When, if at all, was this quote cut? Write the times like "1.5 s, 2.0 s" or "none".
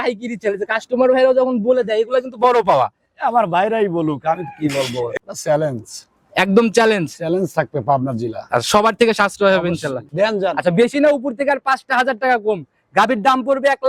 5.1 s, 10.1 s